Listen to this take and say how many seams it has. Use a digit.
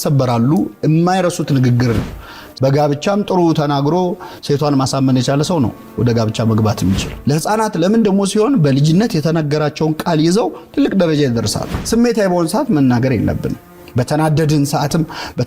3